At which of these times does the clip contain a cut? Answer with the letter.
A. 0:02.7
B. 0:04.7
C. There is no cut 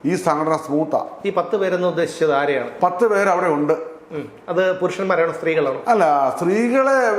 C